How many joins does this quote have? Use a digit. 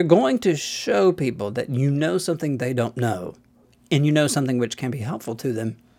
1